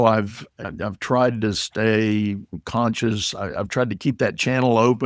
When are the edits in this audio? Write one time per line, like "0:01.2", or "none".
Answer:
0:01.0